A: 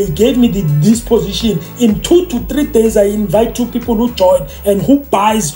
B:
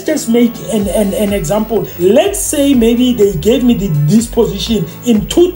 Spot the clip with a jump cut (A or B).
B